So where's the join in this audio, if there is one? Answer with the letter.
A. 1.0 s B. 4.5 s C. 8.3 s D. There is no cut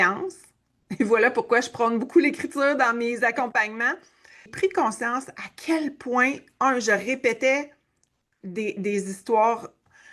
B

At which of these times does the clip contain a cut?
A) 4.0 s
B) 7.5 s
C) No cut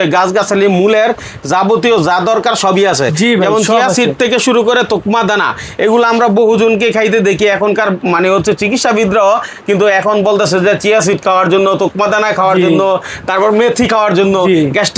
C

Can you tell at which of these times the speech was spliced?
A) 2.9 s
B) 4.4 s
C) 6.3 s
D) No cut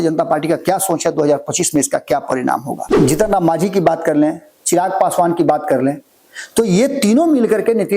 A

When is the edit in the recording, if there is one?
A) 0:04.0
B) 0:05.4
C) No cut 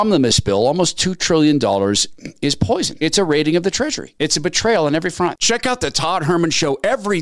B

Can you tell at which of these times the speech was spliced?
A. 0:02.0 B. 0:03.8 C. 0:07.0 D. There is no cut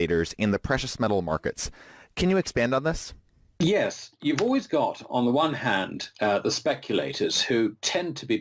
D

